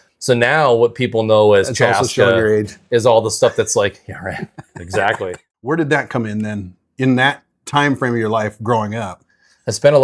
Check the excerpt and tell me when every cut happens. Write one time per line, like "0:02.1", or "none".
0:05.5